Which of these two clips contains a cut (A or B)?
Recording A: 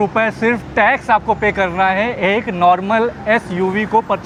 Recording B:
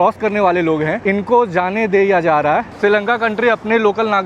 B